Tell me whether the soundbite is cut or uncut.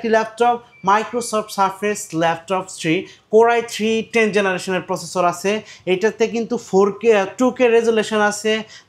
uncut